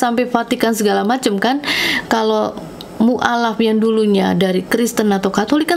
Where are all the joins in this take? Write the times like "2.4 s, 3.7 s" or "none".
none